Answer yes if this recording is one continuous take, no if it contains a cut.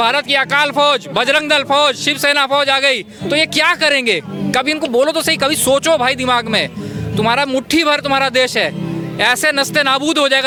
yes